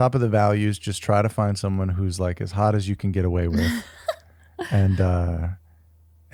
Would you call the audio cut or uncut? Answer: uncut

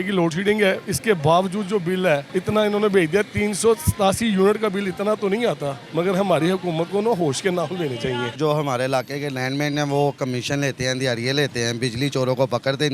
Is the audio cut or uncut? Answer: cut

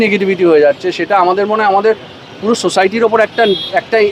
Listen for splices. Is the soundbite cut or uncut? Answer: uncut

